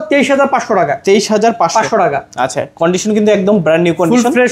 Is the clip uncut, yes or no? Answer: yes